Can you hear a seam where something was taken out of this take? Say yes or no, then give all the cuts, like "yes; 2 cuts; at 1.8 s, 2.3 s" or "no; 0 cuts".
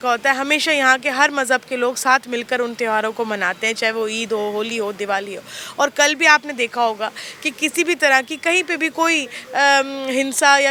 no; 0 cuts